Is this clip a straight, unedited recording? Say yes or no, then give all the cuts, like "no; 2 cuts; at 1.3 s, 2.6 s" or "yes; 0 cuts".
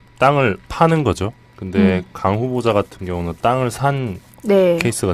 yes; 0 cuts